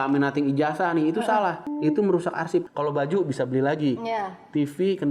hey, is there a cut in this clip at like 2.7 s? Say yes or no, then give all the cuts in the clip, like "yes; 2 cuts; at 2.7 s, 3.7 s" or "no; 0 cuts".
yes; 2 cuts; at 1.7 s, 2.7 s